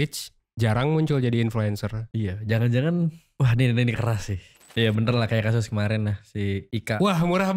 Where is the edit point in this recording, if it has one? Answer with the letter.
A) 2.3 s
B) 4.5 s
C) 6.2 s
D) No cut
B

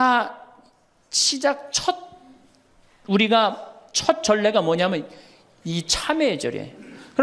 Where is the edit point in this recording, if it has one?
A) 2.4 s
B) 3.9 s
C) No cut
C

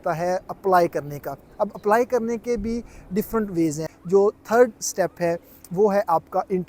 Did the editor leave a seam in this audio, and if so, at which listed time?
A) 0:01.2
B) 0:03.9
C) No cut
B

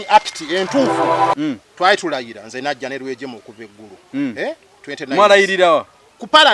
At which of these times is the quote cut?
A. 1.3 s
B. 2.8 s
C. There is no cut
A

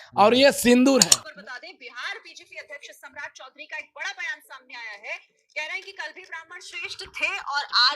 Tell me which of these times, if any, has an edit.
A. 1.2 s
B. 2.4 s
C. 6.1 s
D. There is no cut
A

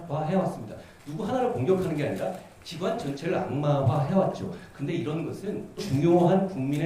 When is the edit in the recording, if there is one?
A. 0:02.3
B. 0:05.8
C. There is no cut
B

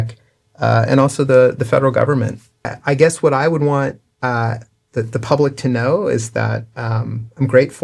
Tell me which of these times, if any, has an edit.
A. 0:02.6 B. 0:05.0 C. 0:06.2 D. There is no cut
A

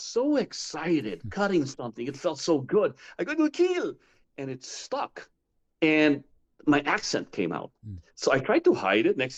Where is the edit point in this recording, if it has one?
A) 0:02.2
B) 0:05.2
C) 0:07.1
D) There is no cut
D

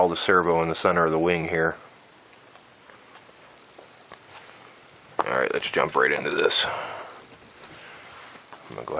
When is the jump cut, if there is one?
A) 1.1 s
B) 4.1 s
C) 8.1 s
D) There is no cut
C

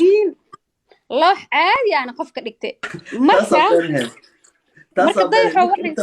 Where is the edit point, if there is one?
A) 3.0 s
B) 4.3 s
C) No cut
A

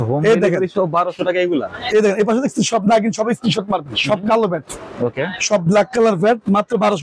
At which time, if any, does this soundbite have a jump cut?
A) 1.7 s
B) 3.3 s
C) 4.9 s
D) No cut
D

